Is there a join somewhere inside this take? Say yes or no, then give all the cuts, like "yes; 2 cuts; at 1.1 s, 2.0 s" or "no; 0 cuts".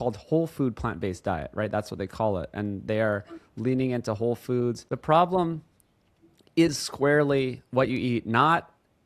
yes; 1 cut; at 4.9 s